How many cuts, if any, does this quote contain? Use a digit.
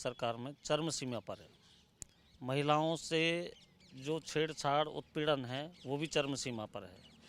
0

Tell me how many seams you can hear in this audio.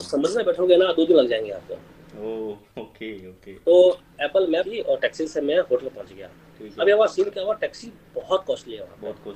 1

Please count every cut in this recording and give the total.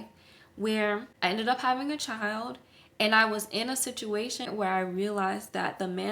2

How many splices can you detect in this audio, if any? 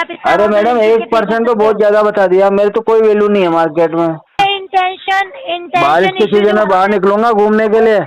1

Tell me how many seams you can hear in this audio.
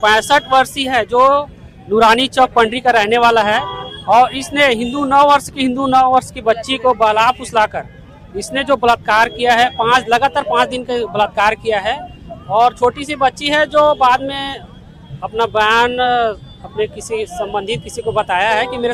0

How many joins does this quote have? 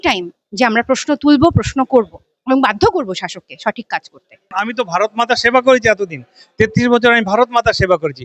1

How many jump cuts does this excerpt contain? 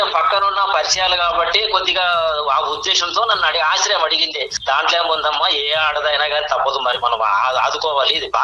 1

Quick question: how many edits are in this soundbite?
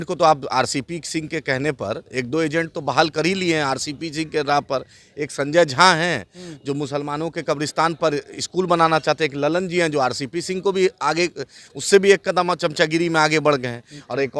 0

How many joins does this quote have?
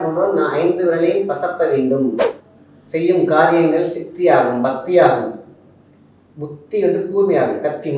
1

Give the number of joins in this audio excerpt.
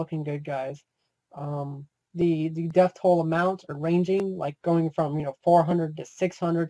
0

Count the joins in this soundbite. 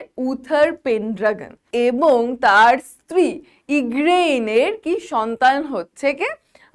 1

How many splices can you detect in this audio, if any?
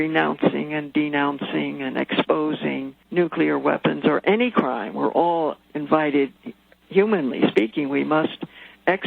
2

